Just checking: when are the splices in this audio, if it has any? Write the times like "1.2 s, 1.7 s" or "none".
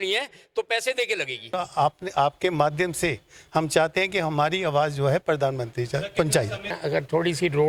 1.5 s, 6.8 s